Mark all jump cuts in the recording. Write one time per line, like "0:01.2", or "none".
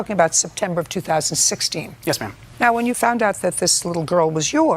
0:02.2

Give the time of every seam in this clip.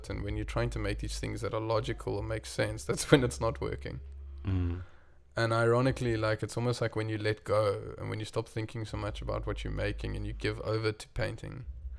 none

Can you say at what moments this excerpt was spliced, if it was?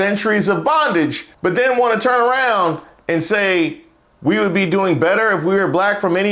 0:01.2

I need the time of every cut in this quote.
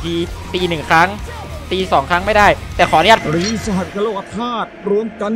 0:03.2

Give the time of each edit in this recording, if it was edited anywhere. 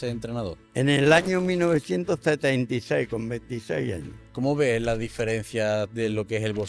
0:04.1

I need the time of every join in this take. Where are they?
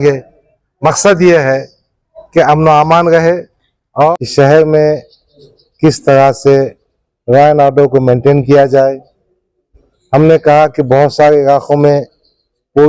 0:04.1

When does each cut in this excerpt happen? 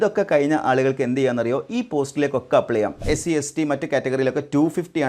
0:03.0

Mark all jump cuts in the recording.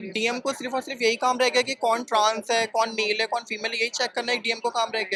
none

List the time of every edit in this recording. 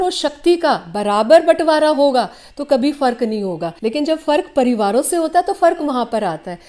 0:03.7

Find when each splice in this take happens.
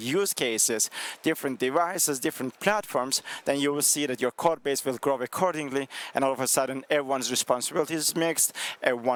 none

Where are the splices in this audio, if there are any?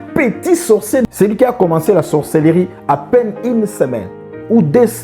0:01.0

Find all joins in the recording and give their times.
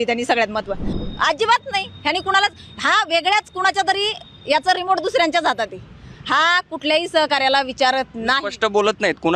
0:01.0

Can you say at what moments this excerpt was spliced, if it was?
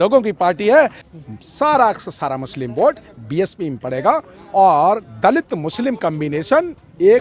0:01.0

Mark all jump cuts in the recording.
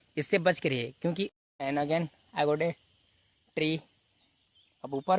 0:01.4

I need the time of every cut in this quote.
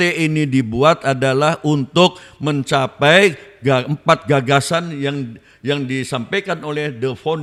none

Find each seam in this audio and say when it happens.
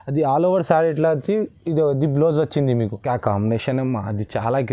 0:03.0

